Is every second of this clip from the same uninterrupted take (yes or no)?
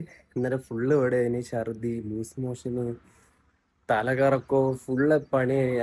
yes